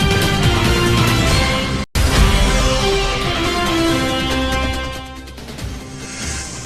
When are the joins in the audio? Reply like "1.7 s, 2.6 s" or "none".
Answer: 1.9 s